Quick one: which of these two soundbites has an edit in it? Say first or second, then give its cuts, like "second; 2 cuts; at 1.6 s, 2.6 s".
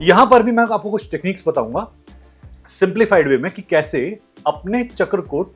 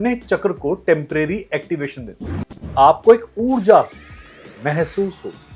second; 1 cut; at 2.6 s